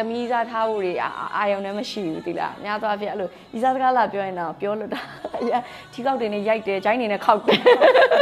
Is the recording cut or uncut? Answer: uncut